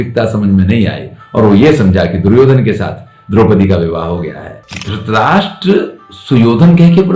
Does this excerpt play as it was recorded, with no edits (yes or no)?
no